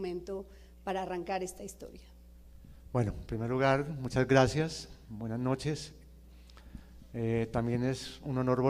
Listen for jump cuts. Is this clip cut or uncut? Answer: cut